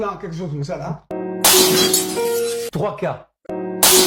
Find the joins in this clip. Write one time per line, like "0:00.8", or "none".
none